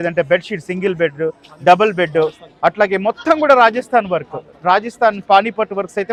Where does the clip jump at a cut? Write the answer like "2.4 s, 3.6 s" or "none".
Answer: none